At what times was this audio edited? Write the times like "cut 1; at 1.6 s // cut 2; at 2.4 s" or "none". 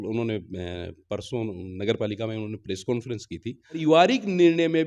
cut 1; at 3.8 s